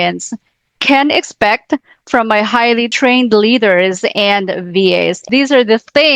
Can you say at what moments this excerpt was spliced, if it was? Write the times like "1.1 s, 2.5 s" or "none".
2.9 s